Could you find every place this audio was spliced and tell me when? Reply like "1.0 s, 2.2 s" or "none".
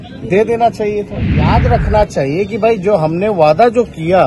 1.5 s